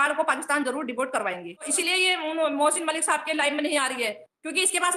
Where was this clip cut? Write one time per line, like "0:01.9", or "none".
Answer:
0:01.7